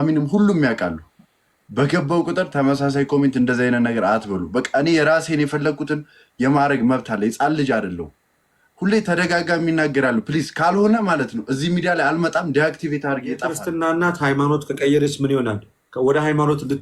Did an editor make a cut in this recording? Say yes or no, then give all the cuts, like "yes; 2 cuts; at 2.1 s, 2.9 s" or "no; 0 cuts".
yes; 1 cut; at 13.6 s